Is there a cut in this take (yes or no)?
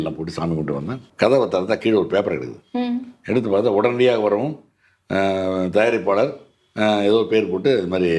yes